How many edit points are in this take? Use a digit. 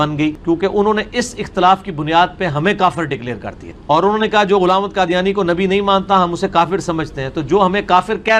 0